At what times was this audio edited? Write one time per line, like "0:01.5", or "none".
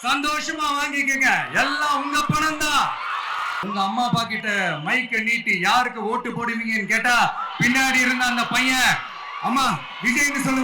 0:03.5